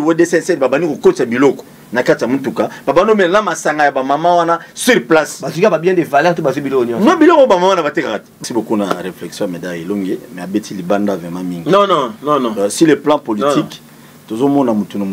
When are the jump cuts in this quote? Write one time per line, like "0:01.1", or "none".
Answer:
0:08.4